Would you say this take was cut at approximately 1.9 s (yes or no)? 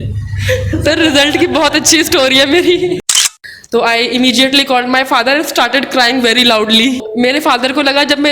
no